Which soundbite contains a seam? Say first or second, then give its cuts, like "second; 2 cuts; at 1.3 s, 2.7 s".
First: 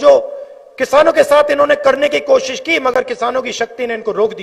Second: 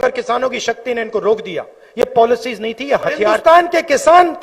second; 1 cut; at 3.4 s